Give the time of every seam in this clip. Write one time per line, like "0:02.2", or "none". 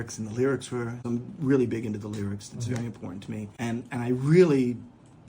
0:01.0
0:03.5